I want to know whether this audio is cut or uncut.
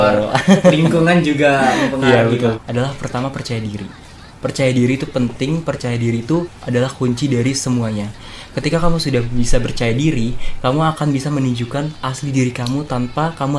cut